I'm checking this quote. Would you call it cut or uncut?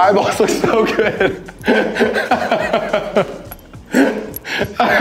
uncut